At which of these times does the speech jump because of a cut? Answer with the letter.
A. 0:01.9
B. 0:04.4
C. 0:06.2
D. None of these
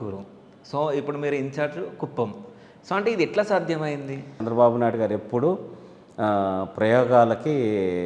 B